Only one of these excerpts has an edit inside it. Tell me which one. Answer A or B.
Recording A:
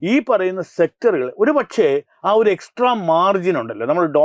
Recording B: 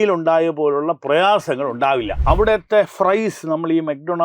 B